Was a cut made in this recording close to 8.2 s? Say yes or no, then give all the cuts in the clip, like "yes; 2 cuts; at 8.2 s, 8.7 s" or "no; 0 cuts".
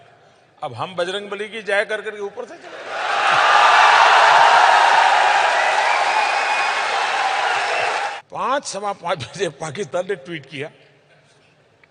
yes; 1 cut; at 8.2 s